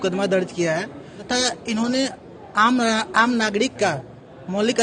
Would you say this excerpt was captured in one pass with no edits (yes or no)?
no